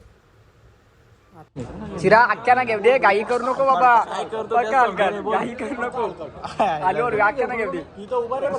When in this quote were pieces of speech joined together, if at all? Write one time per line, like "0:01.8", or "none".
0:01.6

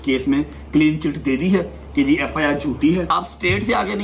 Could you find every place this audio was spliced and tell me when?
0:03.1

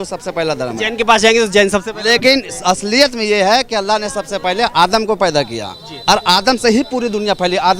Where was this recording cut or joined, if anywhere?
none

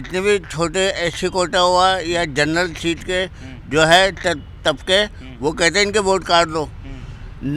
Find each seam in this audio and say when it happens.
none

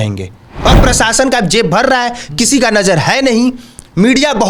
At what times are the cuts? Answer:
none

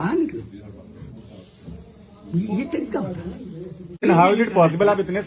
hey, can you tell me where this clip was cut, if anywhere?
0:04.0

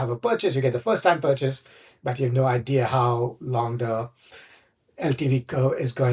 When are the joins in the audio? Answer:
none

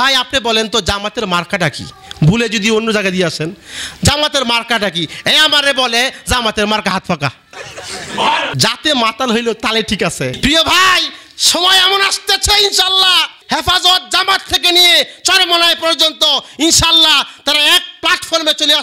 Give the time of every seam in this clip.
0:08.5
0:10.3

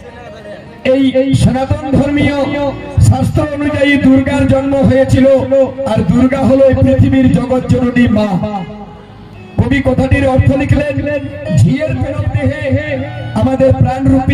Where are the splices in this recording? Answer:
0:12.2

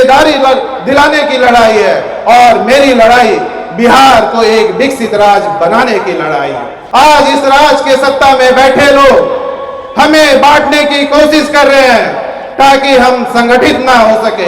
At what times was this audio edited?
0:06.7

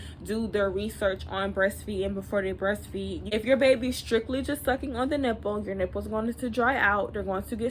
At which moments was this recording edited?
0:03.2

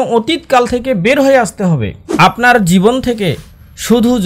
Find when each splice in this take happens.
0:02.0

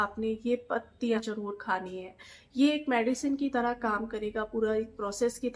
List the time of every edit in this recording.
0:01.2

